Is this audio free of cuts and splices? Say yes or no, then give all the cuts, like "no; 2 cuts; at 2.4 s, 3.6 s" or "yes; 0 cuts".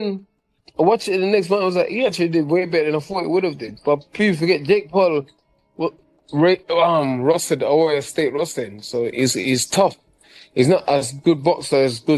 yes; 0 cuts